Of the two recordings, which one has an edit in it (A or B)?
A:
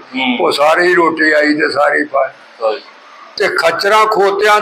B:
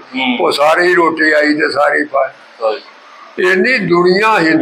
A